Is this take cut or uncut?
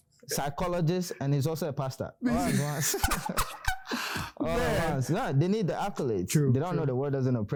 uncut